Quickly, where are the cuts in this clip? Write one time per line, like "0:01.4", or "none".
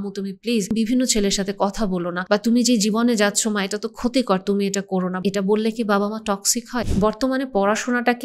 0:00.7
0:02.1
0:05.1
0:06.8